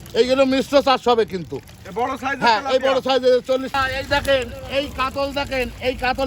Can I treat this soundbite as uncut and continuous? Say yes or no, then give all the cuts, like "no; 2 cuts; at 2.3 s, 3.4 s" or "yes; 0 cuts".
no; 1 cut; at 3.7 s